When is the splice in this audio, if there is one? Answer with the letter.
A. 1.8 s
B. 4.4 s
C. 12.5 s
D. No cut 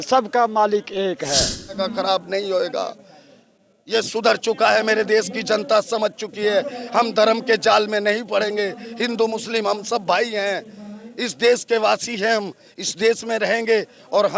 A